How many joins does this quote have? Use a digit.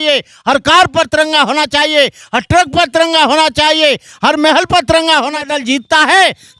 1